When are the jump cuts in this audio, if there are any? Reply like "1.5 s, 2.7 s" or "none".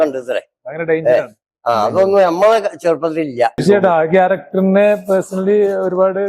3.6 s